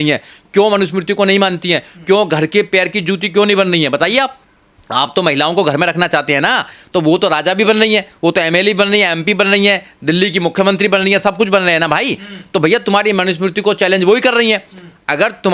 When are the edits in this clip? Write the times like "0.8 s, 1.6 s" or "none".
none